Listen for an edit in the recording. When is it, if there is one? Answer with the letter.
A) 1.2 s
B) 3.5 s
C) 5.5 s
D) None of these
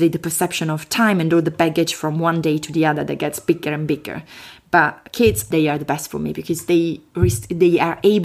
C